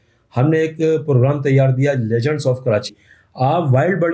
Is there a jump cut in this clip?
yes; 1 cut; at 3.0 s

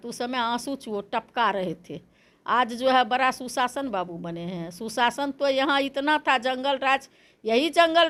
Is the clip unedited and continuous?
yes; 0 cuts

